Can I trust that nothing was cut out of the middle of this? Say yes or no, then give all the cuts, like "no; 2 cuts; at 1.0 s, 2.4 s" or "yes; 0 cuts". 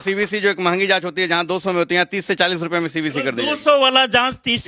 yes; 0 cuts